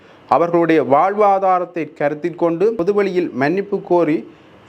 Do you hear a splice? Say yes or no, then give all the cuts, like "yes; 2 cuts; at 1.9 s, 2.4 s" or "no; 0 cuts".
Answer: yes; 1 cut; at 2.8 s